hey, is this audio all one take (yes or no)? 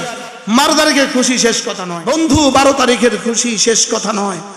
no